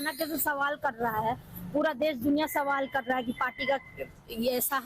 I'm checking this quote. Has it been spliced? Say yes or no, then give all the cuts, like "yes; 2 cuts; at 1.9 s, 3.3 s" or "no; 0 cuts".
yes; 1 cut; at 1.4 s